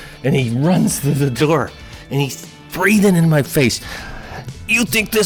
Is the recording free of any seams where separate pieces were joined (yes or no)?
no